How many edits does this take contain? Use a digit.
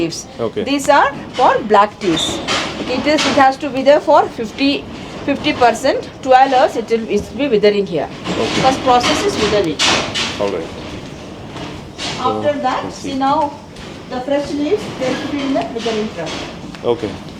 0